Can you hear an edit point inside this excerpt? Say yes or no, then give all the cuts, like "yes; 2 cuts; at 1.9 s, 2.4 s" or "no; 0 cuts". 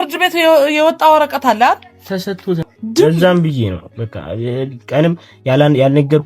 yes; 1 cut; at 2.8 s